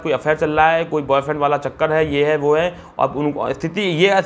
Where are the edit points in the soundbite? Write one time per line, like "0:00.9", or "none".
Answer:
none